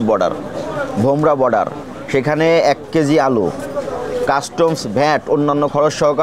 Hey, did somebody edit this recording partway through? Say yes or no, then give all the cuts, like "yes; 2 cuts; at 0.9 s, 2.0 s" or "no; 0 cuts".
no; 0 cuts